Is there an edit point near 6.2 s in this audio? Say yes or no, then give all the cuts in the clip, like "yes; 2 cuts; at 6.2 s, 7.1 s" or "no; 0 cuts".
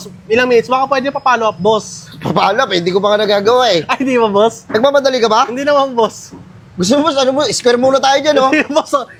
no; 0 cuts